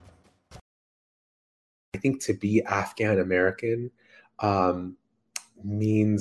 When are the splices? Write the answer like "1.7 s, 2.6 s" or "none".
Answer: 1.3 s